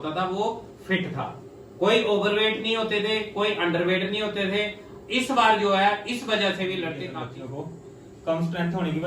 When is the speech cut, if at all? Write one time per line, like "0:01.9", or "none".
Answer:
0:07.0

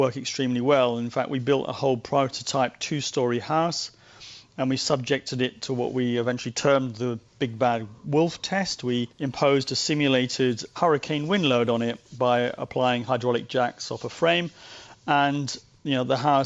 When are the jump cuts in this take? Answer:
none

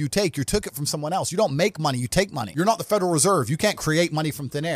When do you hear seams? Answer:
0:02.4

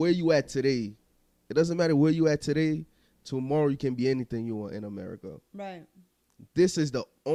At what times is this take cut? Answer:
none

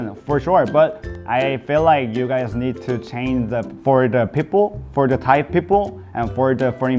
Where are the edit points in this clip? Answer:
0:03.7

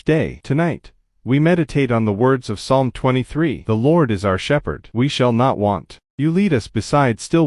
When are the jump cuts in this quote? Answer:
none

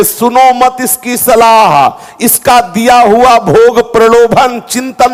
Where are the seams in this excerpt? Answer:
none

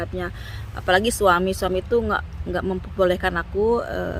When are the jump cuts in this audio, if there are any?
none

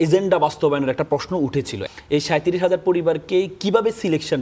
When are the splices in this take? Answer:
0:01.8

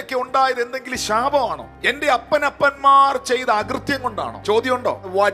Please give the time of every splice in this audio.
0:01.7
0:04.3

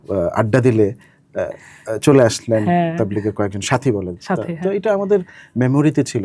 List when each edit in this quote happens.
none

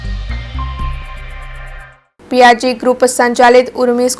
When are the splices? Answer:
0:01.9

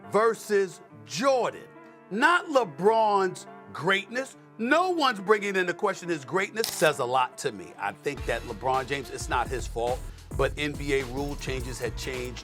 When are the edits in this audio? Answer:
0:06.7

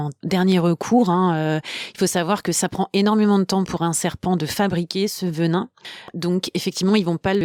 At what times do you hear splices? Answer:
none

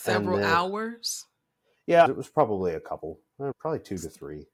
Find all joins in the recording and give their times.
none

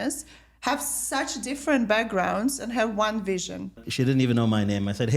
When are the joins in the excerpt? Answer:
0:03.9

